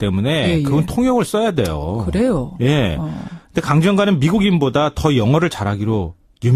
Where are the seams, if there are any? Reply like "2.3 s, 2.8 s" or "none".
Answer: none